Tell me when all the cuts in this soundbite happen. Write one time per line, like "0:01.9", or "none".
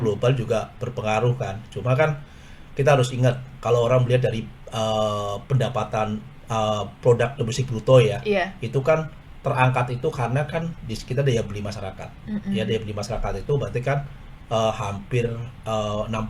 none